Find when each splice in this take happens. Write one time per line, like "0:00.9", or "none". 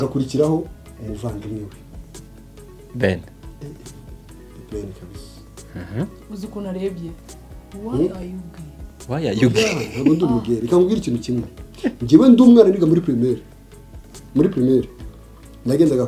none